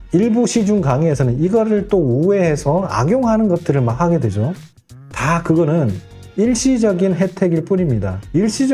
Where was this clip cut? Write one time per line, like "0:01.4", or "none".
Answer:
none